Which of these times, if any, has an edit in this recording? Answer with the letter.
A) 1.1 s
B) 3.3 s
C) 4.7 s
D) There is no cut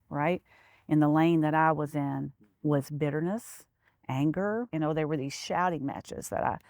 C